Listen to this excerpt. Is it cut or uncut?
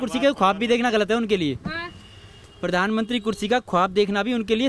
uncut